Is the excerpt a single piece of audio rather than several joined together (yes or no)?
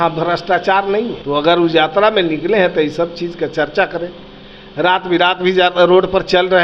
no